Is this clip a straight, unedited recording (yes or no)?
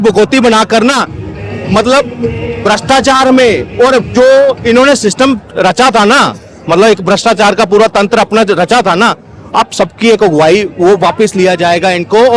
yes